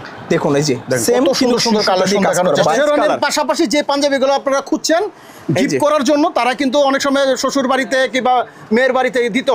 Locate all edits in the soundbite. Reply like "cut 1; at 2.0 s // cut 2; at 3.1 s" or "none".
cut 1; at 2.7 s